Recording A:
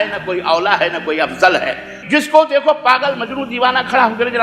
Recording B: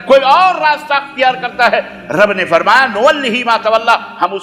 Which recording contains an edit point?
A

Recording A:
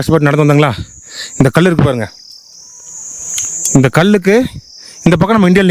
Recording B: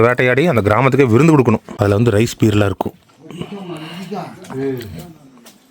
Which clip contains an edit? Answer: B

